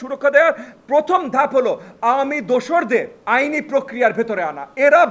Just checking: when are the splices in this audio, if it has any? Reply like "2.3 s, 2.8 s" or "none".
none

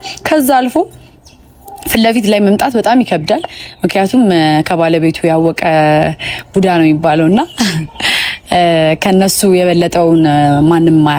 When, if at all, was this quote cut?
none

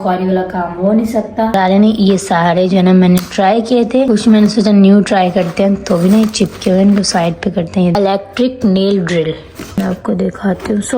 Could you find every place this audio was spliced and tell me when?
1.5 s, 7.9 s

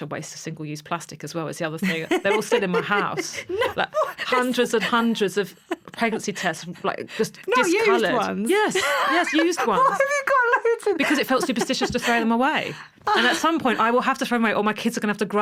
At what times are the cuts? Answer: none

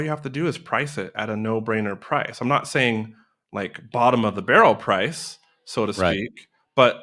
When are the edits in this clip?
none

